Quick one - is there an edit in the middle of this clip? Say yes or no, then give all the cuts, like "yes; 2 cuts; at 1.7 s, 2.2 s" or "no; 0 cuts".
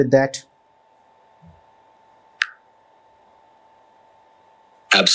no; 0 cuts